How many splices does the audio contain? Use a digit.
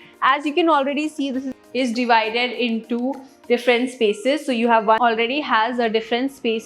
2